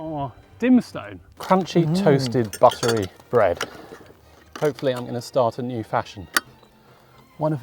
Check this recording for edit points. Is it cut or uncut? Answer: cut